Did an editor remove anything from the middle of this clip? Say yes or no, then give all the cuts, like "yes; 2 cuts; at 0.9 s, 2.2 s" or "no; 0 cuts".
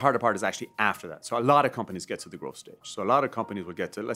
no; 0 cuts